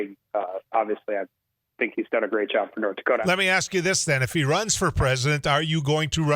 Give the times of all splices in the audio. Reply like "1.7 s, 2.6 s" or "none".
3.2 s